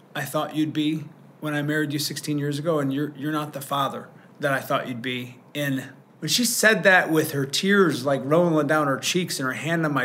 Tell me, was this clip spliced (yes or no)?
yes